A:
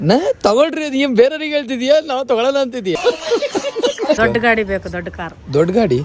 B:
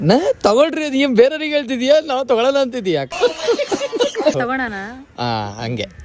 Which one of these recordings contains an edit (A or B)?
A